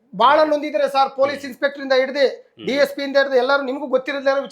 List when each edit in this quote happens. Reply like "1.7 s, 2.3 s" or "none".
none